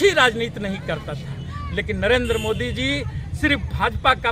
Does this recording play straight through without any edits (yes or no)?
no